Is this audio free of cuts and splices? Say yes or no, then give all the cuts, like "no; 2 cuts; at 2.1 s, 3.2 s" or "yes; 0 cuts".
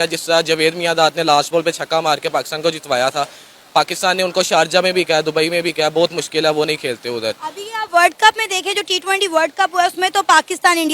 yes; 0 cuts